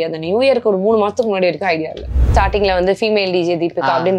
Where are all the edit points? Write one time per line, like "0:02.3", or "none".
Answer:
0:02.3